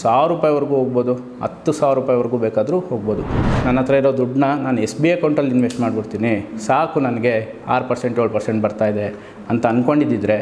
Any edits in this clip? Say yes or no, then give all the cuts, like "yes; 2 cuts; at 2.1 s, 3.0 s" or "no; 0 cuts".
yes; 1 cut; at 3.4 s